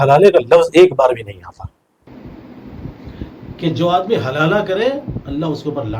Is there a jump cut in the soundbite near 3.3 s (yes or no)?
no